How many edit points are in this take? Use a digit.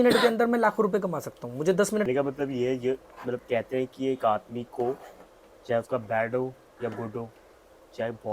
1